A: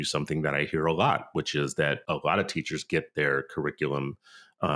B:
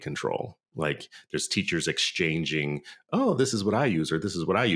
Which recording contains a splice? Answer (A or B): A